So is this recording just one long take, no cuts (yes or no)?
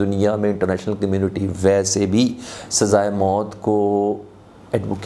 yes